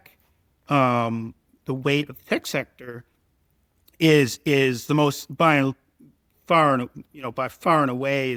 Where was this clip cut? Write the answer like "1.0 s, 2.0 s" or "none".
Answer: none